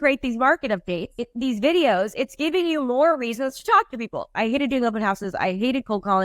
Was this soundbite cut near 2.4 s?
no; 2 cuts; at 1.2 s, 4.3 s

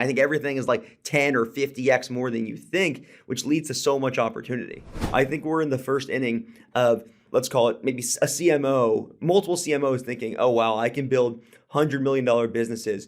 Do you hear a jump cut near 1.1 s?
no; 2 cuts; at 5.0 s, 7.2 s

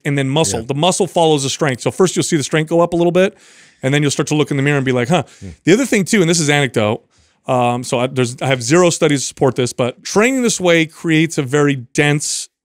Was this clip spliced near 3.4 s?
no; 1 cut; at 10.0 s

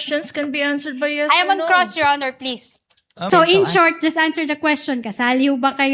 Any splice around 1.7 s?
no; 1 cut; at 3.3 s

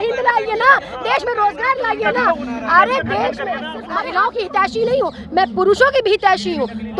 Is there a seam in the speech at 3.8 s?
yes; 1 cut; at 3.8 s

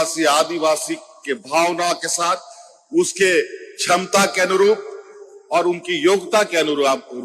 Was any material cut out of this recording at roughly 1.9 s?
no; 0 cuts

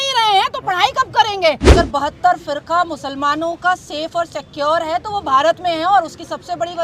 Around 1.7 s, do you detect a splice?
yes; 1 cut; at 1.7 s

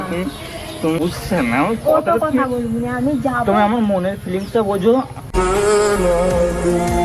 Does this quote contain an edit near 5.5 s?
no; 1 cut; at 1.0 s

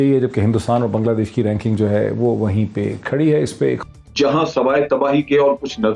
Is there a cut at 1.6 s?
no; 1 cut; at 3.8 s

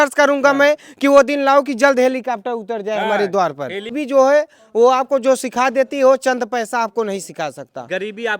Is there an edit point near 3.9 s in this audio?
yes; 1 cut; at 3.9 s

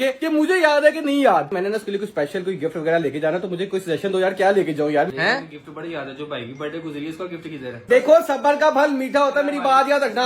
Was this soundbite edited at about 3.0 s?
no; 3 cuts; at 1.5 s, 5.1 s, 7.7 s

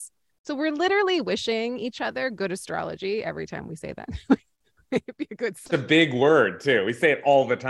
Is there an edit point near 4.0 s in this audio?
no; 1 cut; at 5.6 s

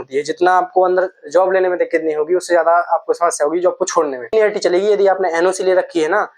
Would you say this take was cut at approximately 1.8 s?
no; 1 cut; at 4.3 s

